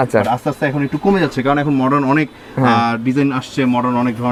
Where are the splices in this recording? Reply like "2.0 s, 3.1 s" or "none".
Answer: none